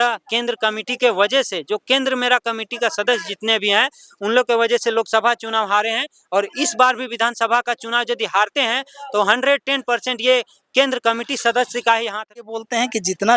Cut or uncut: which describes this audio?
cut